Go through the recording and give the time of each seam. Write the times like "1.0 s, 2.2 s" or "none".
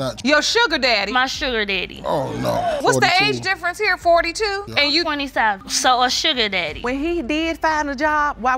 6.7 s